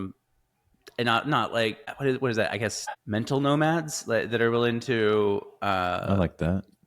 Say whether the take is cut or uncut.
cut